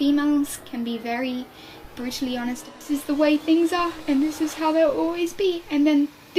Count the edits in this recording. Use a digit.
1